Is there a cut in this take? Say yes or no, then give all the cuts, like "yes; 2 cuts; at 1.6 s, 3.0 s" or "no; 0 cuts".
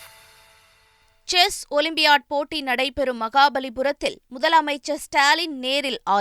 yes; 1 cut; at 0.9 s